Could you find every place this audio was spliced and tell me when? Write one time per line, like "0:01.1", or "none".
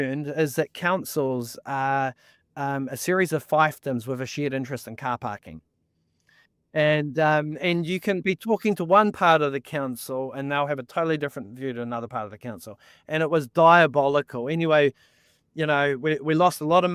none

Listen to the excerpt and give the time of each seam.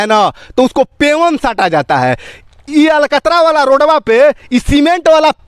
none

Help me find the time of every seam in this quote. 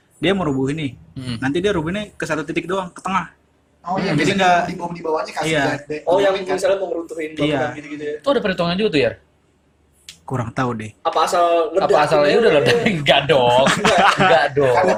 none

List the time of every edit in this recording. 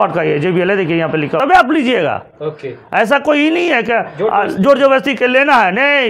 0:01.4

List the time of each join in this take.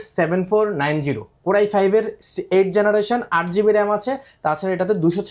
none

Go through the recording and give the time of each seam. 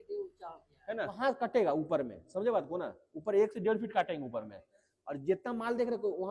0:01.2

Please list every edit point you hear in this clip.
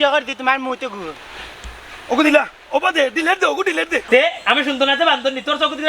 0:04.0

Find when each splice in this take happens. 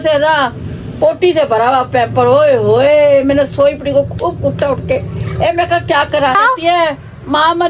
0:02.5
0:06.4

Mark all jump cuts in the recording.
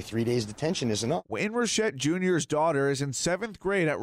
0:01.3

